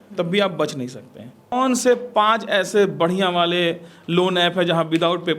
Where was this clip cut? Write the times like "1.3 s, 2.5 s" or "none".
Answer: 1.5 s